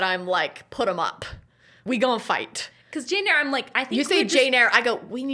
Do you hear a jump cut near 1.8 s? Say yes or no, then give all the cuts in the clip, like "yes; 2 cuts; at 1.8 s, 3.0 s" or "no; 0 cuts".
yes; 1 cut; at 1.8 s